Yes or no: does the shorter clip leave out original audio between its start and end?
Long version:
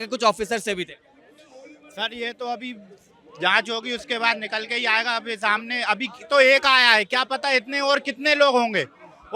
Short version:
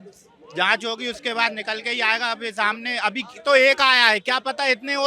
no